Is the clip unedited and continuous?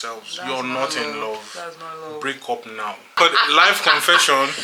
no; 1 cut; at 3.1 s

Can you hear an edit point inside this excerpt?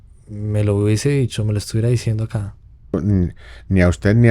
yes; 1 cut; at 2.9 s

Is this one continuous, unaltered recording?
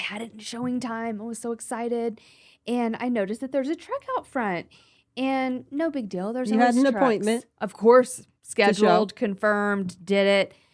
yes; 0 cuts

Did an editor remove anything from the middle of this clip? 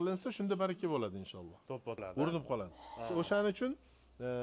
yes; 1 cut; at 2.0 s

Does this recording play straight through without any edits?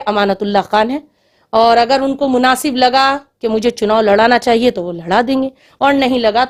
yes; 0 cuts

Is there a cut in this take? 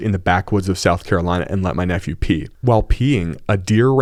no; 0 cuts

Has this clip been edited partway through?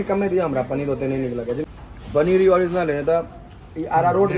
yes; 1 cut; at 1.7 s

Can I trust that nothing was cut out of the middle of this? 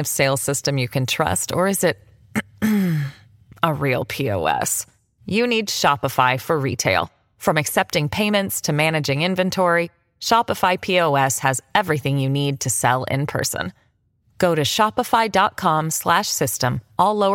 yes; 0 cuts

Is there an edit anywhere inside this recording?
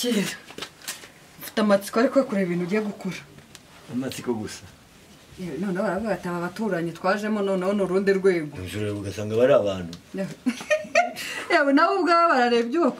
no; 0 cuts

